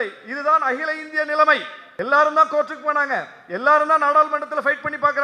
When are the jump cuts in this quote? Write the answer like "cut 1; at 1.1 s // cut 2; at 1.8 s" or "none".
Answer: cut 1; at 1.8 s